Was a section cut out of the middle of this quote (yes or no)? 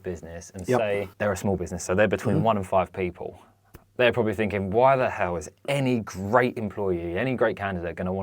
yes